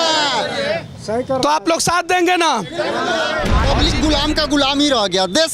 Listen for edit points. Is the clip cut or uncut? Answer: cut